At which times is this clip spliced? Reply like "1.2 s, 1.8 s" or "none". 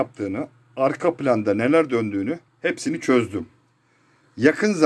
3.8 s